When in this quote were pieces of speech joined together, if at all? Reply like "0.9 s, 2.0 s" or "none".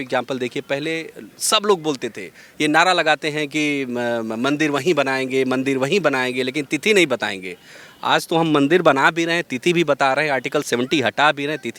none